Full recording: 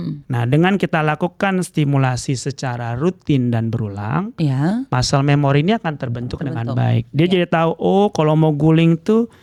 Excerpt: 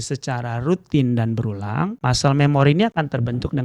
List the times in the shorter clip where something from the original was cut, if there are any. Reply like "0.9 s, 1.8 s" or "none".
2.0 s